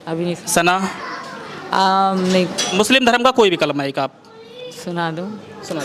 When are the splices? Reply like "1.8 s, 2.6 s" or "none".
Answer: 2.6 s